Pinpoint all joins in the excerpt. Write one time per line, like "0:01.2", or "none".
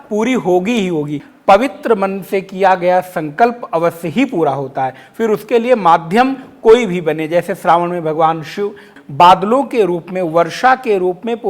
0:01.3
0:08.9